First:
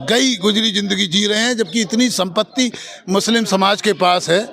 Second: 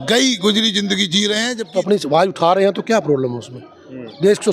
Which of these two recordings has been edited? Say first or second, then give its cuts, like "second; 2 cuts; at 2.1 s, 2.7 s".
second; 1 cut; at 1.6 s